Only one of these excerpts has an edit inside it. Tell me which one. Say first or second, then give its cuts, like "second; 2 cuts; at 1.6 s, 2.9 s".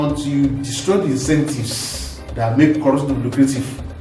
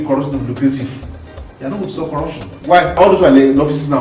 second; 1 cut; at 3.0 s